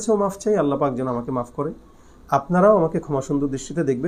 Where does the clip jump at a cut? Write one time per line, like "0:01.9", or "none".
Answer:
none